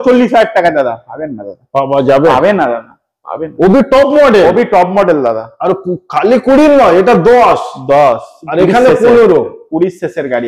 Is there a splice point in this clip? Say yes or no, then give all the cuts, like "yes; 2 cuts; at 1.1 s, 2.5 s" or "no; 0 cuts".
no; 0 cuts